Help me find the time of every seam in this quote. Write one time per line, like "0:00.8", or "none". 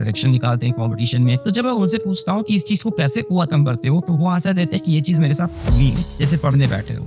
0:01.4
0:06.1